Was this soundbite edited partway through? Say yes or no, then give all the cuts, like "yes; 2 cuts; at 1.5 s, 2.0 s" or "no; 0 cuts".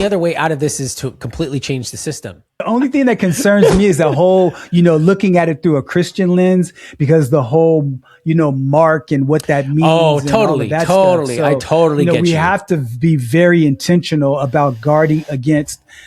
yes; 1 cut; at 2.6 s